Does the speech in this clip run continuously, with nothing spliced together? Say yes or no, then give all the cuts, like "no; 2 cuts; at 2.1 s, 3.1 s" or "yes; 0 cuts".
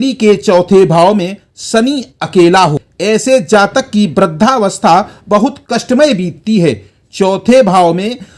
no; 1 cut; at 2.9 s